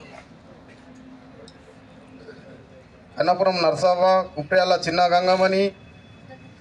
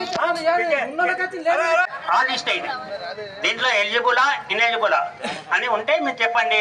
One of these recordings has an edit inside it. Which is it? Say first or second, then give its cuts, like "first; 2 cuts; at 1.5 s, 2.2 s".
second; 1 cut; at 2.0 s